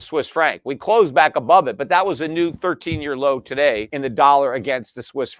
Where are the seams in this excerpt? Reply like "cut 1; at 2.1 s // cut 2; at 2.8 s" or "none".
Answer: cut 1; at 3.9 s